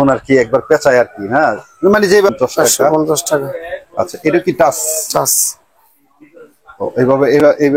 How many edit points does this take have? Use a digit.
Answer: 1